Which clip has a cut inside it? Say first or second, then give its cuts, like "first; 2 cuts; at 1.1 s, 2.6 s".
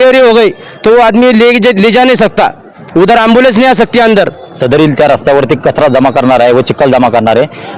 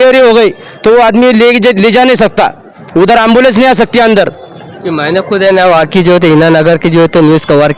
first; 1 cut; at 4.6 s